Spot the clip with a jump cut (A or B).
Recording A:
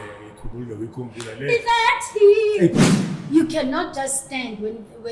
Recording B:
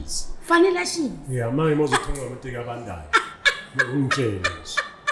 A